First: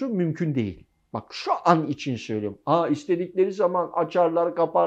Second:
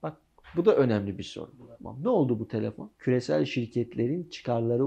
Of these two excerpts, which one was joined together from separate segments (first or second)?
second